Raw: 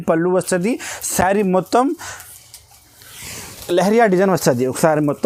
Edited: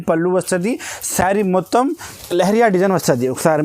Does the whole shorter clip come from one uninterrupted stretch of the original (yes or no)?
no